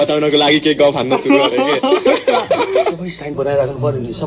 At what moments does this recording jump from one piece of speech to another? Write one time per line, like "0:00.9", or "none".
0:03.3